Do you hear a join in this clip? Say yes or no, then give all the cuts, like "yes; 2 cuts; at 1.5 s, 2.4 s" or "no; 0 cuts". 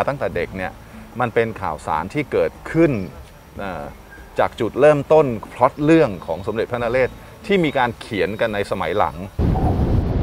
yes; 1 cut; at 9.3 s